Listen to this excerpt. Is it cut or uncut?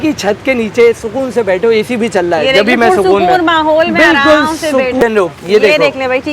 cut